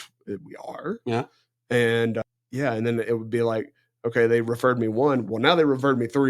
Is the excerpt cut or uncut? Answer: cut